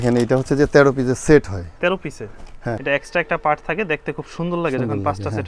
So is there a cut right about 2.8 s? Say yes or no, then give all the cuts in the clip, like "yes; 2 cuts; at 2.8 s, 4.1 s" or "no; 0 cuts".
yes; 1 cut; at 2.8 s